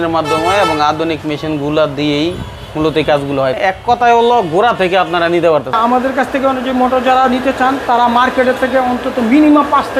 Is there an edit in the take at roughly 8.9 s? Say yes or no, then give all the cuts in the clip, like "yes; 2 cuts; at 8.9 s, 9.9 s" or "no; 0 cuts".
no; 2 cuts; at 3.5 s, 5.8 s